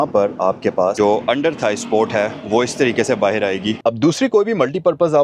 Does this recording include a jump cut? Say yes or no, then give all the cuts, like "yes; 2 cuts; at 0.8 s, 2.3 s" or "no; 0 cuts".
yes; 2 cuts; at 0.9 s, 3.8 s